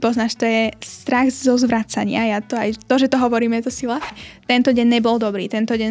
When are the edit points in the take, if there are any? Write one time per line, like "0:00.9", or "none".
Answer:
0:04.2